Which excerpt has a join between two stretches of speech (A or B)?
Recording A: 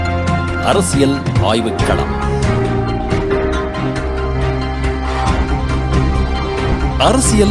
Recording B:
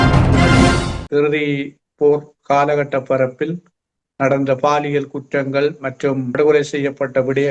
B